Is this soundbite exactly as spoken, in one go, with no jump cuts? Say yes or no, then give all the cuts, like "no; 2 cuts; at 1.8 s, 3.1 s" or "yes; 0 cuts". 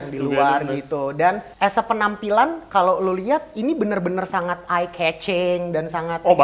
no; 1 cut; at 1.5 s